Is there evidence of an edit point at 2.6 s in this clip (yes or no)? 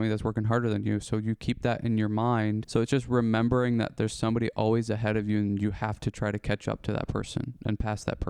yes